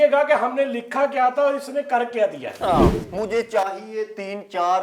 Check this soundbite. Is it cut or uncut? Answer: cut